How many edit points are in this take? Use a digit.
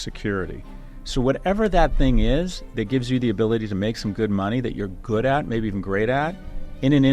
0